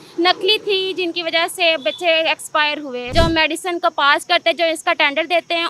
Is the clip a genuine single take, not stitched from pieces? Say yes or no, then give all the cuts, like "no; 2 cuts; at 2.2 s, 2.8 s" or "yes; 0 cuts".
no; 1 cut; at 3.0 s